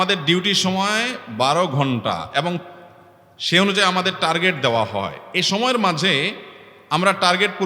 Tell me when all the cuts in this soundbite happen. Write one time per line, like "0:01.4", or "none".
none